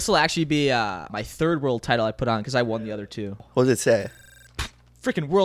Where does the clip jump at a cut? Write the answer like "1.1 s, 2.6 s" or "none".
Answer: 1.2 s, 3.4 s